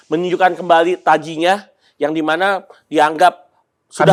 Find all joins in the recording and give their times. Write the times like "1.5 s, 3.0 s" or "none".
none